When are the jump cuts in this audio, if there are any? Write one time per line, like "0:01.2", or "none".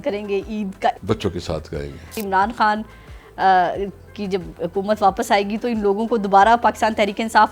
0:01.0
0:02.1